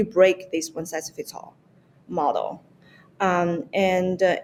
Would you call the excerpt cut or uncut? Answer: uncut